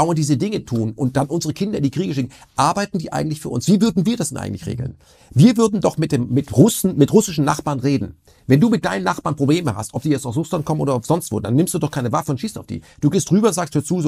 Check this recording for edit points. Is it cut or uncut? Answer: uncut